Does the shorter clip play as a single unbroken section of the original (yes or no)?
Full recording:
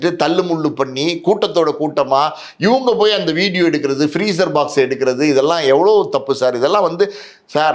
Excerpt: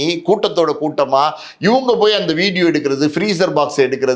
yes